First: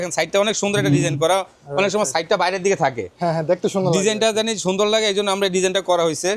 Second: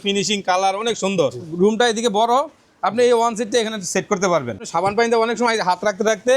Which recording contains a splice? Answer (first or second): second